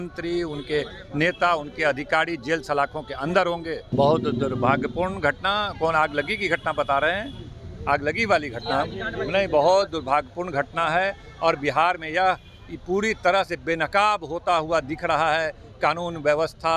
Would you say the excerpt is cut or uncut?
cut